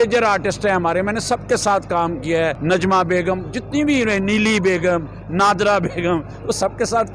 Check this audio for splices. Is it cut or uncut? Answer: cut